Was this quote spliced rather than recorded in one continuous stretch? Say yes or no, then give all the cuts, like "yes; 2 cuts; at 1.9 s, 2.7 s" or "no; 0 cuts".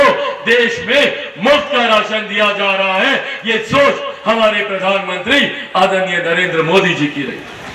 no; 0 cuts